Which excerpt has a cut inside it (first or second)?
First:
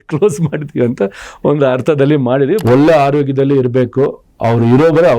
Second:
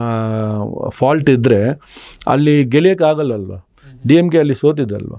first